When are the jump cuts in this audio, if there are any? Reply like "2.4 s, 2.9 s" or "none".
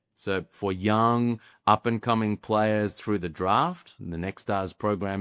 none